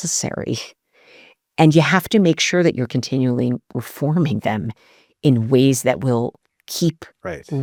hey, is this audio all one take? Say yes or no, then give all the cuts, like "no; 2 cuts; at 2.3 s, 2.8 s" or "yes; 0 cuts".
yes; 0 cuts